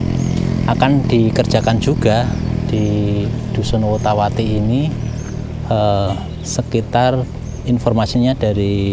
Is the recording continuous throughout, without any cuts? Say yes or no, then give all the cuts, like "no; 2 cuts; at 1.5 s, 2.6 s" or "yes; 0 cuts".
yes; 0 cuts